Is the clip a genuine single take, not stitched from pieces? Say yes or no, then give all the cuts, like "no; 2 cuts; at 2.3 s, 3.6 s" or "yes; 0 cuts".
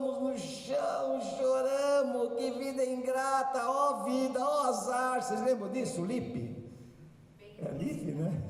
yes; 0 cuts